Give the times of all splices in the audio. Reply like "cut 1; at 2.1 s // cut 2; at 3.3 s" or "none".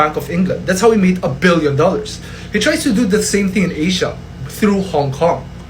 none

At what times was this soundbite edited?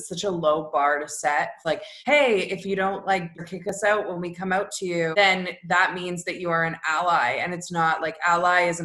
cut 1; at 1.7 s // cut 2; at 3.4 s // cut 3; at 5.1 s

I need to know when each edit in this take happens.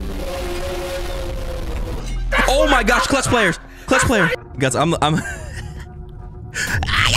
cut 1; at 4.4 s

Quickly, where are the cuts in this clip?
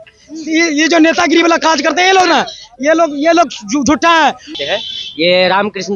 cut 1; at 4.5 s

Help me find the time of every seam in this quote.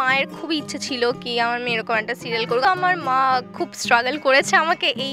cut 1; at 2.6 s

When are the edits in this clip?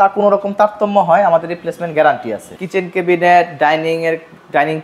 cut 1; at 2.5 s

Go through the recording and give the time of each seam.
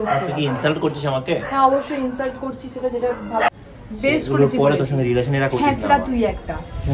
cut 1; at 3.5 s

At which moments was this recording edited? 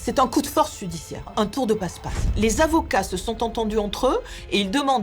cut 1; at 1.3 s

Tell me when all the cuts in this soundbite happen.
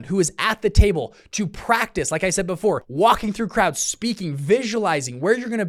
cut 1; at 2.9 s

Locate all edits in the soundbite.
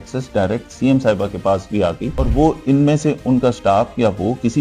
cut 1; at 2.1 s

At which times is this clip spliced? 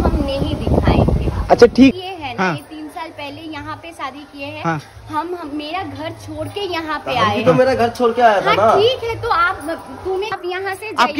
cut 1; at 1.9 s // cut 2; at 10.3 s

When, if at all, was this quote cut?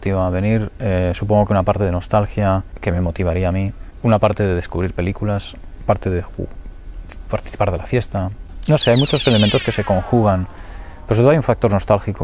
cut 1; at 7.8 s

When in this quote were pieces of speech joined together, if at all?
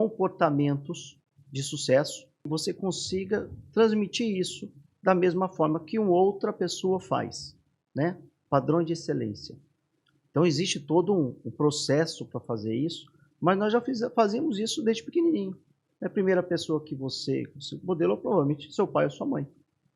cut 1; at 2.5 s

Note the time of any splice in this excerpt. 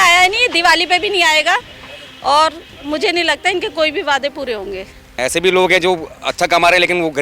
cut 1; at 5.1 s

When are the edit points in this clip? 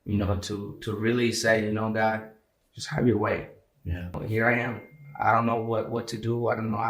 cut 1; at 4.2 s

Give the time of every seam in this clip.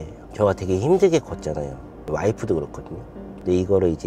cut 1; at 2.1 s

